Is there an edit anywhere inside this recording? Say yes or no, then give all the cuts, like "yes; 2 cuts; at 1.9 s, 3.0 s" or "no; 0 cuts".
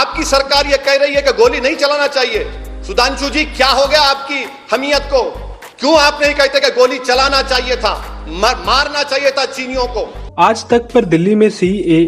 no; 0 cuts